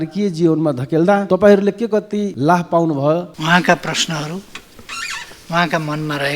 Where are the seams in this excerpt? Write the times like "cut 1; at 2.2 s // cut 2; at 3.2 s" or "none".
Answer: cut 1; at 1.2 s // cut 2; at 2.3 s // cut 3; at 3.3 s